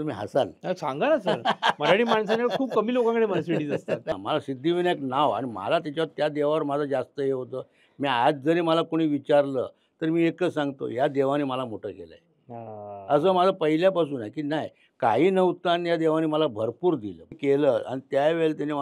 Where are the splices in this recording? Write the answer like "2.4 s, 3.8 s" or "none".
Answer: 4.1 s, 17.4 s